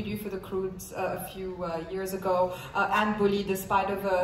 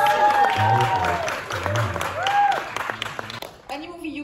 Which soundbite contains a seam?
second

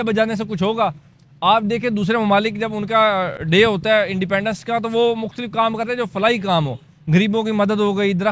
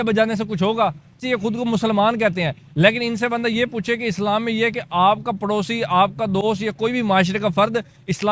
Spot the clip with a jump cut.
second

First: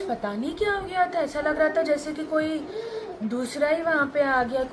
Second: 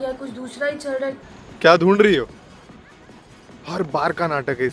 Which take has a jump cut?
second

